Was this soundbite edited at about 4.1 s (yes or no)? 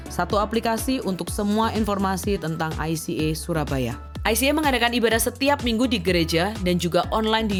no